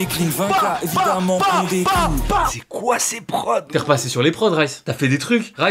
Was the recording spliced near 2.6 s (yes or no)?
yes